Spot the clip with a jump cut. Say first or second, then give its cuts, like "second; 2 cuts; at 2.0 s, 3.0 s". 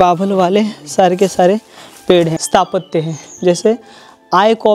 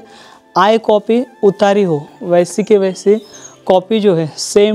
first; 1 cut; at 2.4 s